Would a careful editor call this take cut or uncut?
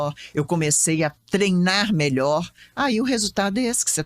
uncut